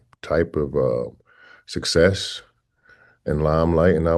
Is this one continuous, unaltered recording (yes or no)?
yes